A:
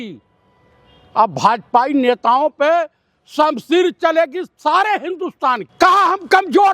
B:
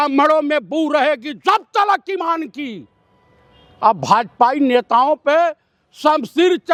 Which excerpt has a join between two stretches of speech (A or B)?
A